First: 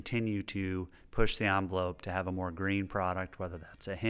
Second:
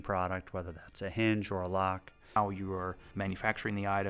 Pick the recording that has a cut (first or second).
second